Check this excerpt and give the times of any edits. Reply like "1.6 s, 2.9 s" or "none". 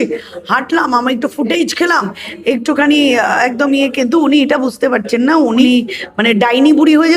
5.6 s

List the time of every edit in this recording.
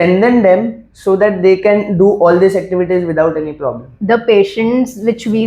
3.9 s

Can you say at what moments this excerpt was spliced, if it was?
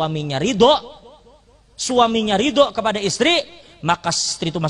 none

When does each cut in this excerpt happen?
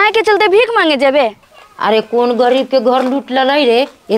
1.4 s

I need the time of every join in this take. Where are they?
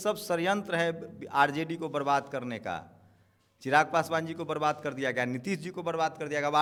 none

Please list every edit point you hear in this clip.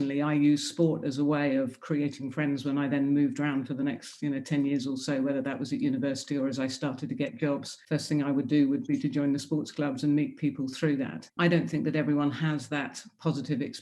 11.3 s

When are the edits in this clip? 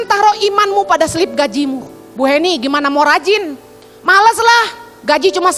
none

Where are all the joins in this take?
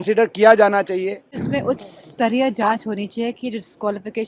1.4 s

